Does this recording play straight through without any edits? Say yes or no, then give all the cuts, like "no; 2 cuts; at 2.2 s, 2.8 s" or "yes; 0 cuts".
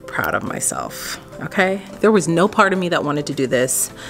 no; 1 cut; at 1.9 s